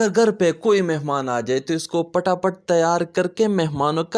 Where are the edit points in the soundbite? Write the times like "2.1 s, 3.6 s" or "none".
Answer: none